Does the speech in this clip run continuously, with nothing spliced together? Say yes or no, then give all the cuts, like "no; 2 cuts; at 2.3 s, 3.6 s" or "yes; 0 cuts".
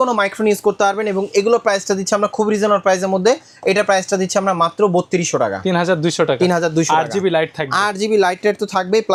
yes; 0 cuts